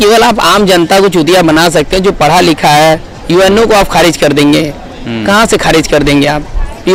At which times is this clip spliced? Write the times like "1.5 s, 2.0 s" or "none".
none